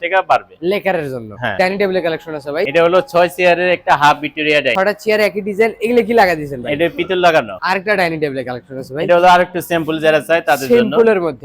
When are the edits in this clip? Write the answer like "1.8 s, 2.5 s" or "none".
1.5 s, 2.7 s, 4.7 s, 7.5 s